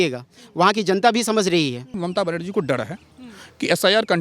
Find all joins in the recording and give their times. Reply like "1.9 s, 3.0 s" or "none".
2.0 s